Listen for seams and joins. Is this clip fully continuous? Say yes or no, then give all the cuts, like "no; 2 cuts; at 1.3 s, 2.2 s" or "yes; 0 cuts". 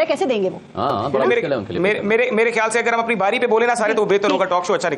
yes; 0 cuts